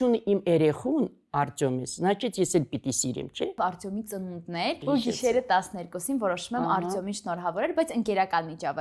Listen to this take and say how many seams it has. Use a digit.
2